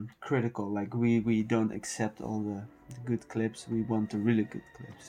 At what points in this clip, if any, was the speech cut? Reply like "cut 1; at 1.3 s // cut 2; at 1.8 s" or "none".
none

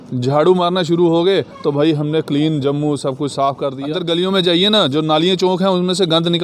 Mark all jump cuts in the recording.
cut 1; at 3.9 s

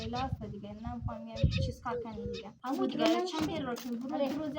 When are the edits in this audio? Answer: cut 1; at 2.5 s

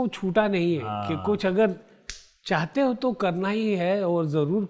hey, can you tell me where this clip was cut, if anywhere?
none

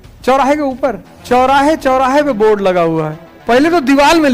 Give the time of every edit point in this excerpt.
cut 1; at 1.1 s // cut 2; at 3.3 s

